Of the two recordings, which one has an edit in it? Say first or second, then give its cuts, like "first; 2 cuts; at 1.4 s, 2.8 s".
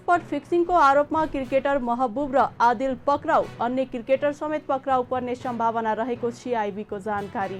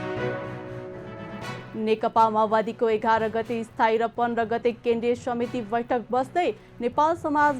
second; 1 cut; at 1.6 s